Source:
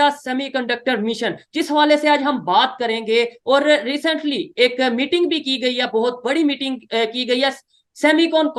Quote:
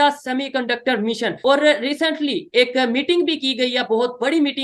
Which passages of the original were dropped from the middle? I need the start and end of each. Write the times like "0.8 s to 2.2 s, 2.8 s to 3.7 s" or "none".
1.3 s to 3.4 s